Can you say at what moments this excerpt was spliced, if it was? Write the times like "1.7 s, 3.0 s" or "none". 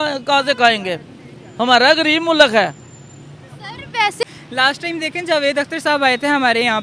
4.2 s